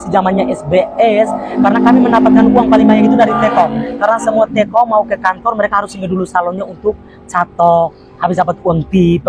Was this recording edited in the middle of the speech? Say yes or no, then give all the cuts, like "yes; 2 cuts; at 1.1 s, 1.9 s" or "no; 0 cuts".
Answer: no; 0 cuts